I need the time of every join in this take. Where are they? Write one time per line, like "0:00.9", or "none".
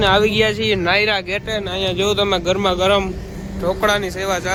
none